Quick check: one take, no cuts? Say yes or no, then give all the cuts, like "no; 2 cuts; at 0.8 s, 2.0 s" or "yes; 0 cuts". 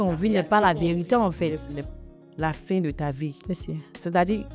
no; 1 cut; at 1.8 s